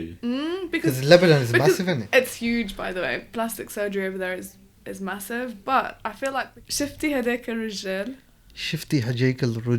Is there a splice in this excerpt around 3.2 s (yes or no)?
no